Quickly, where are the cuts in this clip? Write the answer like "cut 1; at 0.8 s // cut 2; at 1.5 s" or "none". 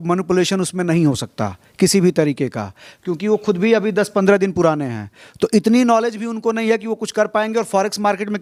none